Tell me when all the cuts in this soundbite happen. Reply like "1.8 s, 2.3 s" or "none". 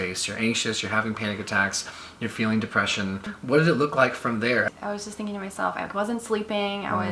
3.3 s, 4.7 s